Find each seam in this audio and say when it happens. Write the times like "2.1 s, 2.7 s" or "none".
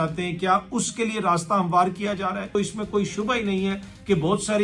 2.5 s